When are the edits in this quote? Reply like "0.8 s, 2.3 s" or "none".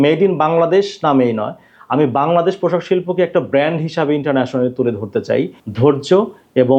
5.6 s

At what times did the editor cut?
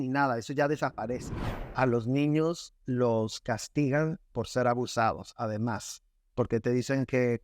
1.4 s

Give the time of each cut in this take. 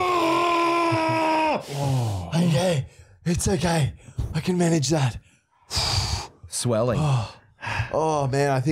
none

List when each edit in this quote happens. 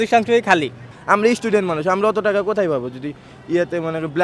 0.9 s

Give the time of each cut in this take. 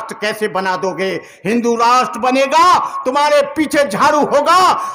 none

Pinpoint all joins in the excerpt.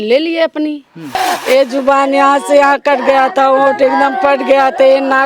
1.2 s

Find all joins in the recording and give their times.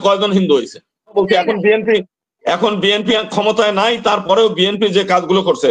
1.1 s

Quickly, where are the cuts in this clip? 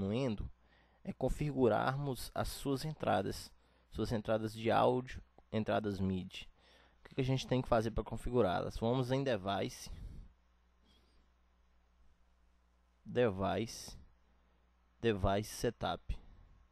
none

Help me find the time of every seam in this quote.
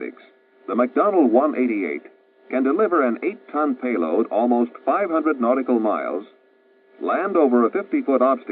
5.4 s

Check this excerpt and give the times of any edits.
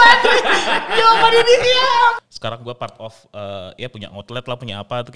2.2 s

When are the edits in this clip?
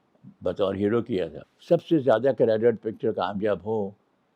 1.5 s

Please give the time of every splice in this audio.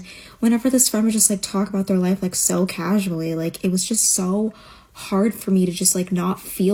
none

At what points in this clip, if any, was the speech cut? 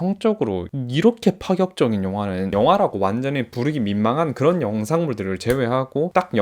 none

